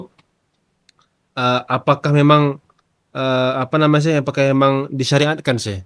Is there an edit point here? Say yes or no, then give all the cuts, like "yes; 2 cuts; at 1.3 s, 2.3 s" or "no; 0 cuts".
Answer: no; 0 cuts